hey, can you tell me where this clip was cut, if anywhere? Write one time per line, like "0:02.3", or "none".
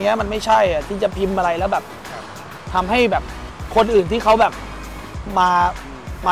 none

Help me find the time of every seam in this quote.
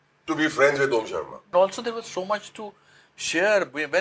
0:01.5

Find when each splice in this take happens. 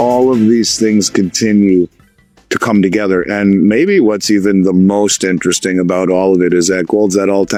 none

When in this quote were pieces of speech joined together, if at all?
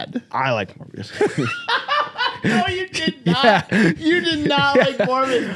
none

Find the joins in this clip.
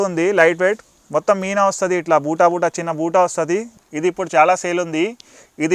0:03.7

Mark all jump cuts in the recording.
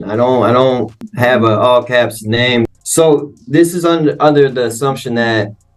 0:01.1
0:02.7

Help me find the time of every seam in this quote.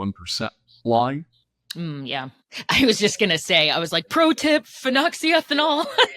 none

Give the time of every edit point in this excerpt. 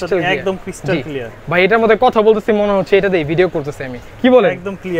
none

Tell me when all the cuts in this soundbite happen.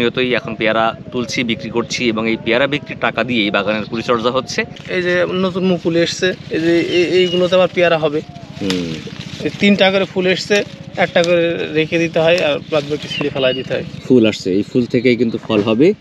0:04.8
0:13.9

